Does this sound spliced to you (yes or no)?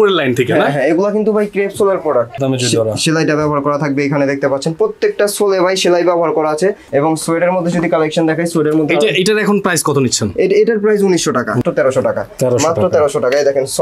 yes